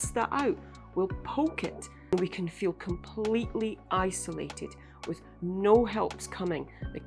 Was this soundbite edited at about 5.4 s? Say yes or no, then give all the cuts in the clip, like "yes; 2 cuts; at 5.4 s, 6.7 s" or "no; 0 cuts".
no; 1 cut; at 2.1 s